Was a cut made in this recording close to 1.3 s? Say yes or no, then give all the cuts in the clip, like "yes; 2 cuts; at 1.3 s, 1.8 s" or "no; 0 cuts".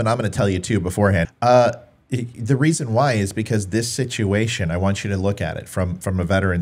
yes; 1 cut; at 1.3 s